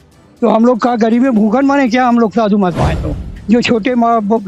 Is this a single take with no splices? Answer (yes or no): no